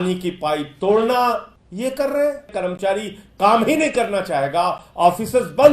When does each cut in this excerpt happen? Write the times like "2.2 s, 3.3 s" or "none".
1.6 s, 2.5 s